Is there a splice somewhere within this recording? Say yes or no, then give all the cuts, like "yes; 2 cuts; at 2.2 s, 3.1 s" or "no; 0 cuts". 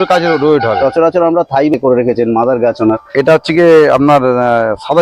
yes; 1 cut; at 1.7 s